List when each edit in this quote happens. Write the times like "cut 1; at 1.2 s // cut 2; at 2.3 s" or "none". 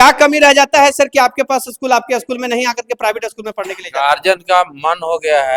none

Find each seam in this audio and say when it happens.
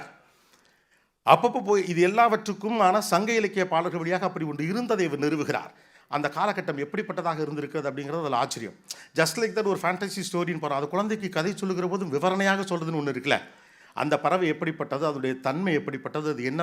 none

